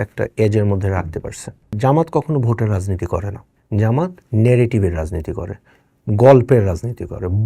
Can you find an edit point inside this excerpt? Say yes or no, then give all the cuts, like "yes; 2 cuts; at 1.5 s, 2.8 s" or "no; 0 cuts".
yes; 1 cut; at 1.8 s